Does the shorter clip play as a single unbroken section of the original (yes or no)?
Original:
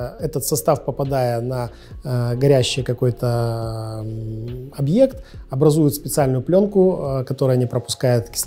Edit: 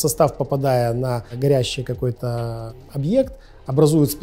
no